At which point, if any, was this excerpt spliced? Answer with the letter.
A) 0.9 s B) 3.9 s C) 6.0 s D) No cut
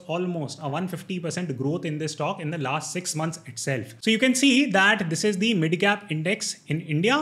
B